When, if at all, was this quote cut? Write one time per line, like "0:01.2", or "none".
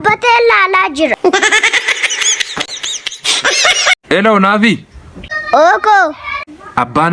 0:04.0